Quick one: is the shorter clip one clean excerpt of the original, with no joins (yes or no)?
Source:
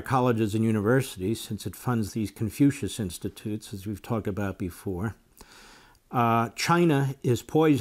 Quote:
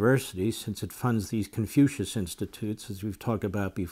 yes